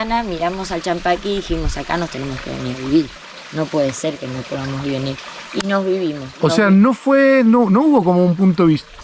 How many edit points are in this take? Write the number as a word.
zero